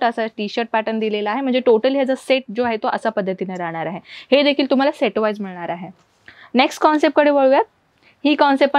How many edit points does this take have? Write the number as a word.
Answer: zero